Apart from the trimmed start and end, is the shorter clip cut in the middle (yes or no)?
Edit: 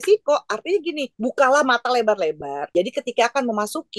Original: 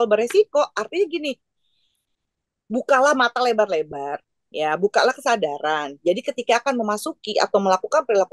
yes